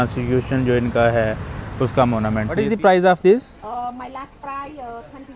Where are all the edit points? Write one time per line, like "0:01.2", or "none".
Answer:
0:02.6